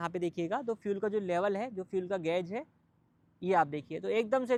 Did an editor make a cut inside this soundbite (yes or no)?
no